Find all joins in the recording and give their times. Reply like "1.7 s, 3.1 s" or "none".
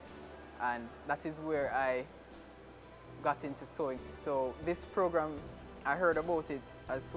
4.0 s